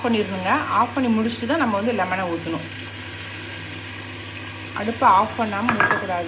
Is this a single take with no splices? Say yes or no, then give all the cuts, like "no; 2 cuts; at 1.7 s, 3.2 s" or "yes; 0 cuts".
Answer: yes; 0 cuts